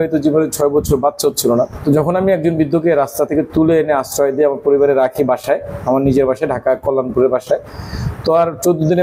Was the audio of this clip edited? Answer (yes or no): yes